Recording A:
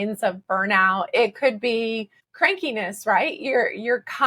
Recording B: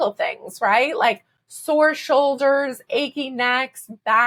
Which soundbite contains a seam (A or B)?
A